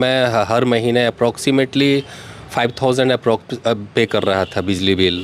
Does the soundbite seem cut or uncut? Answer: uncut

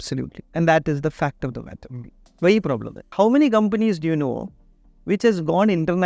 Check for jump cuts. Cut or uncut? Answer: cut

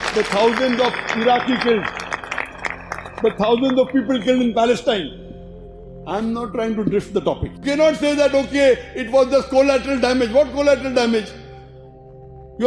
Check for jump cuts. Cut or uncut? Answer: cut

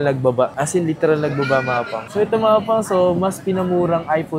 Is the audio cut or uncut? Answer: cut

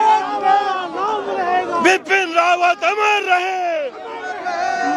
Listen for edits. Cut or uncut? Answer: uncut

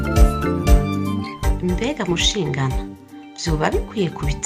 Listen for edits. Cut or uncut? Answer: cut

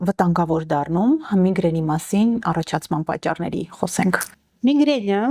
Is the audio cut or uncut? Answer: uncut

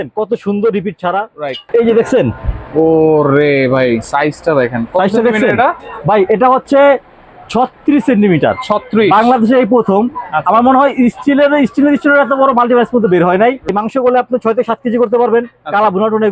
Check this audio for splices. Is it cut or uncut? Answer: cut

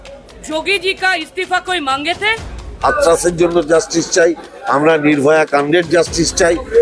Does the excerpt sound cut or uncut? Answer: cut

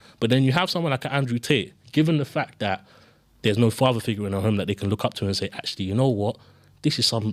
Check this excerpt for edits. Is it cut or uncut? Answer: uncut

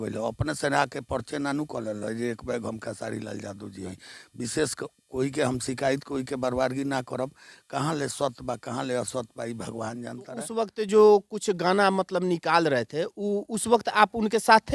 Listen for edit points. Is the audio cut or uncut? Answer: cut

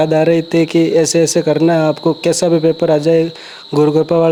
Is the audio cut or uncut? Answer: uncut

